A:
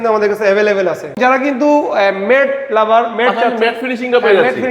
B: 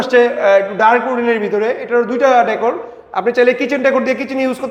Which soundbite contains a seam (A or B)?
A